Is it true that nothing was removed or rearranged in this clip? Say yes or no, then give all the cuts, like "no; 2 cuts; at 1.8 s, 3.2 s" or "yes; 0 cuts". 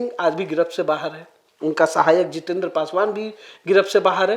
yes; 0 cuts